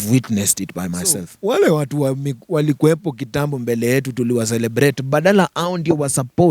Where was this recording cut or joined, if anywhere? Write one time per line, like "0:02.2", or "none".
0:01.3